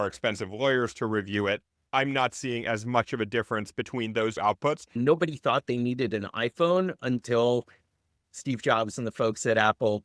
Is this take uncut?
no; 2 cuts; at 1.7 s, 4.9 s

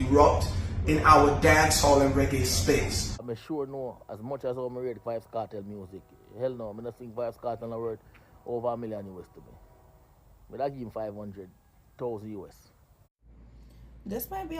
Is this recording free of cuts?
no; 2 cuts; at 3.3 s, 13.5 s

